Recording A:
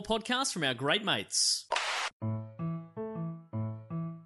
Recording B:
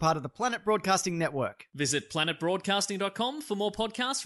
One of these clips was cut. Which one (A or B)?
A